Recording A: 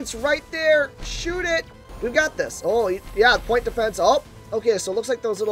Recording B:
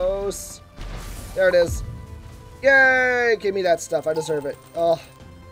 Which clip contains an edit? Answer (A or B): A